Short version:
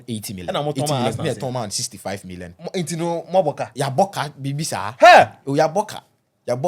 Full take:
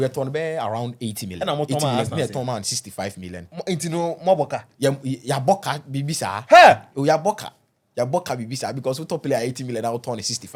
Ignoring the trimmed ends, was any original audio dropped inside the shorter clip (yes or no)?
yes